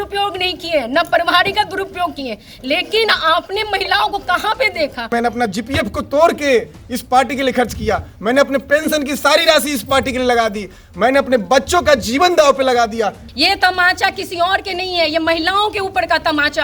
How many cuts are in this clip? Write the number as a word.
two